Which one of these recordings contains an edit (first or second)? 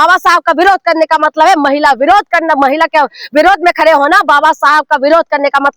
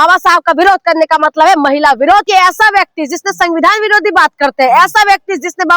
second